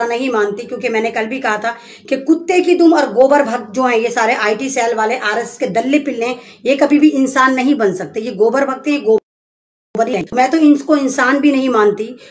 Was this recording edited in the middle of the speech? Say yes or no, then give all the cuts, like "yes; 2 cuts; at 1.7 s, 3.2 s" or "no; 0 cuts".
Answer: no; 0 cuts